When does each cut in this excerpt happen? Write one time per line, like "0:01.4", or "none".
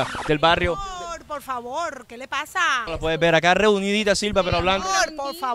0:02.9